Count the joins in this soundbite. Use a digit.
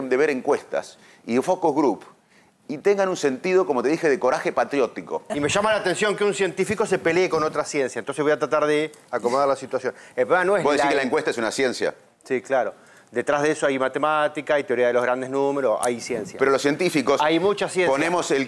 1